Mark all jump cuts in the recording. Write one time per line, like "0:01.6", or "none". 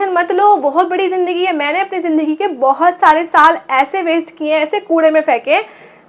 none

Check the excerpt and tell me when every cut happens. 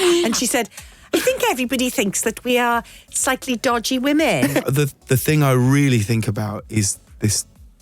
0:04.6

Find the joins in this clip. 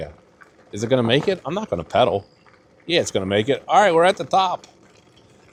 none

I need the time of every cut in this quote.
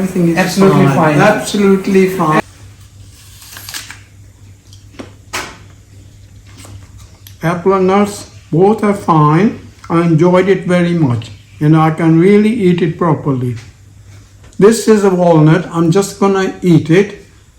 0:02.4
0:14.4

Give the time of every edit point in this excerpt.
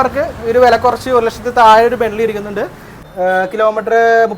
0:03.0

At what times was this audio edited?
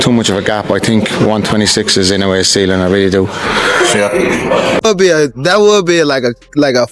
0:04.9

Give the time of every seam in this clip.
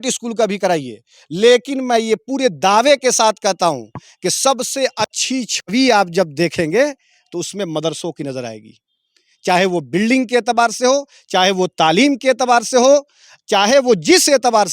none

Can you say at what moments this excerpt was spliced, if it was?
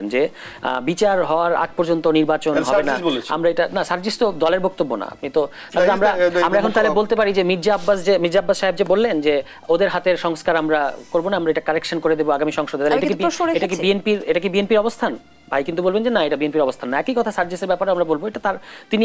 none

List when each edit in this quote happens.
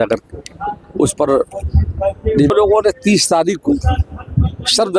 0:02.5

